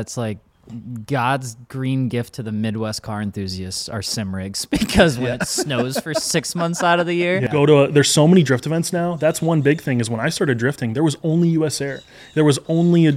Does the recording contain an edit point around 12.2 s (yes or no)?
no